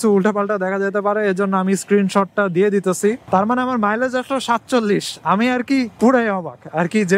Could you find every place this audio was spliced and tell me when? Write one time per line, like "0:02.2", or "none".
0:03.2